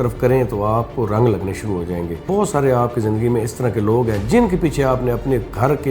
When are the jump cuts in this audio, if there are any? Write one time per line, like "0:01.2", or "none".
0:02.2